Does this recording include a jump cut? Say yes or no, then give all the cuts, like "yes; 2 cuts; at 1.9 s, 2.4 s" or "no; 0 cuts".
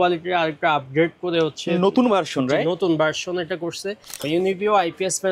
yes; 1 cut; at 4.2 s